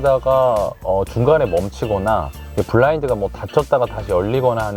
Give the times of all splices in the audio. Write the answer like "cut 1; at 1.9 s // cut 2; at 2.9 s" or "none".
none